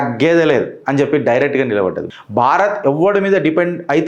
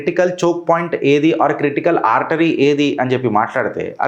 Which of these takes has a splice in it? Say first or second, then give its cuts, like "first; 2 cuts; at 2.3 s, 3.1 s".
first; 1 cut; at 2.0 s